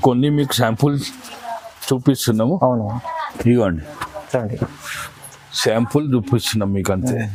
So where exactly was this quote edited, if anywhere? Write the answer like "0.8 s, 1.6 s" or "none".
none